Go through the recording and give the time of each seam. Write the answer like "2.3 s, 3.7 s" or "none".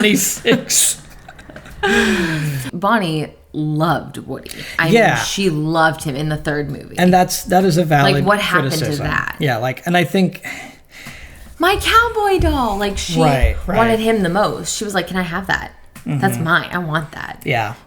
2.7 s

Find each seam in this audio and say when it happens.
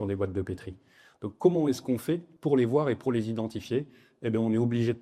2.3 s

